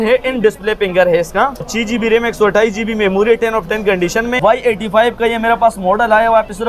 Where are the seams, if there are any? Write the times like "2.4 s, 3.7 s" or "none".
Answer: 1.7 s, 4.4 s